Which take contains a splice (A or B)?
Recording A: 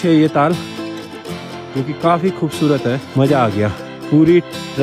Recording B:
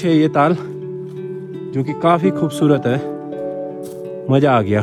A